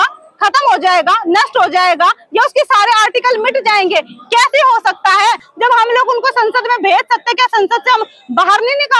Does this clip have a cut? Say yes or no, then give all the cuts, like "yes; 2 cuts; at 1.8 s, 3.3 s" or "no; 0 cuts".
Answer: yes; 1 cut; at 5.5 s